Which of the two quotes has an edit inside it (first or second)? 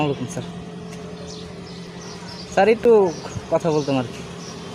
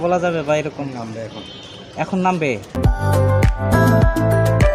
second